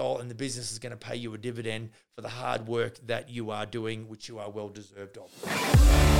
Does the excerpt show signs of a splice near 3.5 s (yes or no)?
no